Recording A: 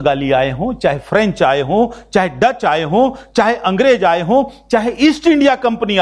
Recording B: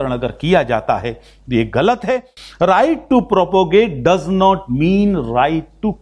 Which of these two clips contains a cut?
B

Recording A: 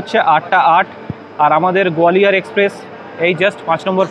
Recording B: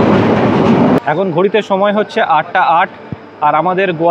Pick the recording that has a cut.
B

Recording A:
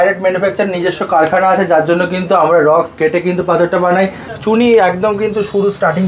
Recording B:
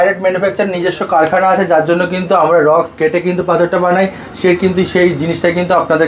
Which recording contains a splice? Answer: A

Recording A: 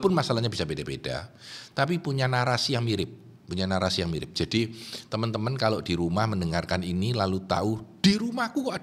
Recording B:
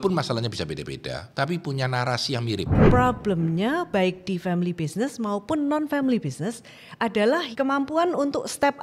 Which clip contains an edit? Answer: B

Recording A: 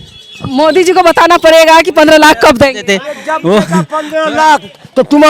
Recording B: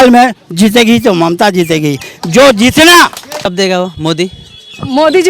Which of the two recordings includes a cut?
B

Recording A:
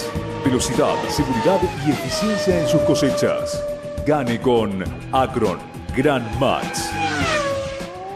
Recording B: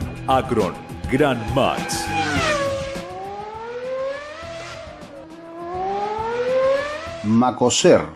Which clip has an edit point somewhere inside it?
B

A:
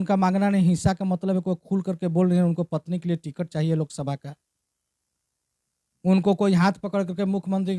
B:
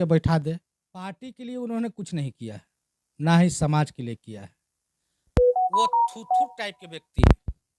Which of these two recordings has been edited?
B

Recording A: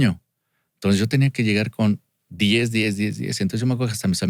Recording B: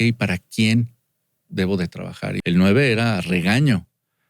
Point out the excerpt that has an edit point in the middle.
B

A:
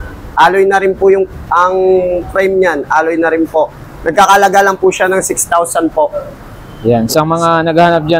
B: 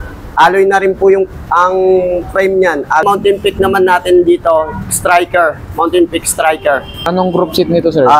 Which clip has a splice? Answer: B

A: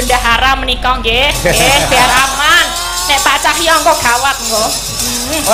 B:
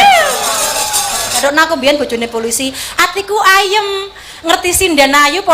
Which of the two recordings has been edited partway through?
B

